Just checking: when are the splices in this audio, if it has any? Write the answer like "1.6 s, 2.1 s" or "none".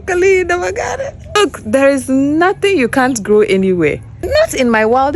1.4 s, 4.1 s

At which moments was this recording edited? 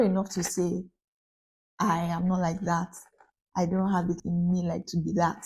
4.2 s

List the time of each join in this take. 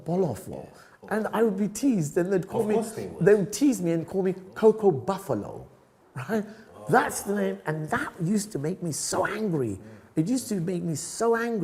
none

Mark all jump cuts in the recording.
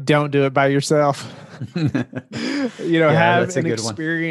none

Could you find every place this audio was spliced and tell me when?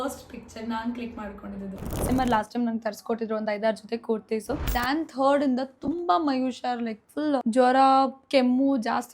2.0 s, 4.7 s, 7.4 s

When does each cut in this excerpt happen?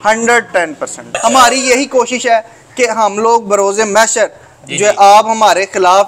1.2 s

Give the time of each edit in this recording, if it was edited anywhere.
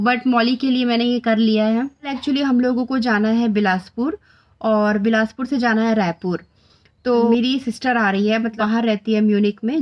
2.1 s, 7.3 s, 8.6 s

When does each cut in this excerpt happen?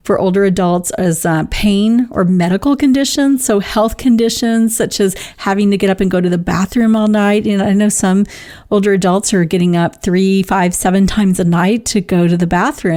none

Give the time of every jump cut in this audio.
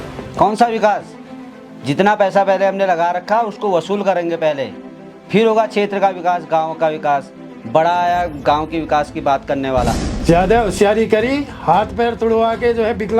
10.1 s

